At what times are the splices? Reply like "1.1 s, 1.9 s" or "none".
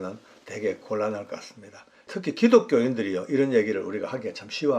2.1 s